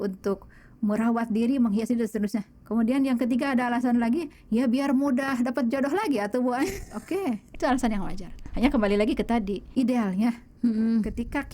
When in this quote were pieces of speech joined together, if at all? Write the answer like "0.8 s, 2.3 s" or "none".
2.6 s, 7.5 s, 9.6 s